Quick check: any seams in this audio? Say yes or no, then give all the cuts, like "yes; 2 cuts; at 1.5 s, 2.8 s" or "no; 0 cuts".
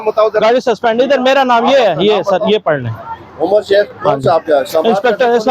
no; 0 cuts